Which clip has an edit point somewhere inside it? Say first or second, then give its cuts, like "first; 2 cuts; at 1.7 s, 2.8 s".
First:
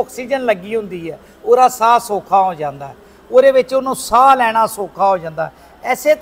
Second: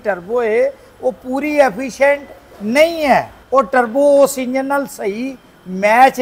second; 1 cut; at 3.4 s